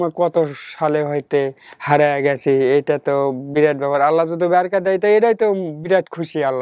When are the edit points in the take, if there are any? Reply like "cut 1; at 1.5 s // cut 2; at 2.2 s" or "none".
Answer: none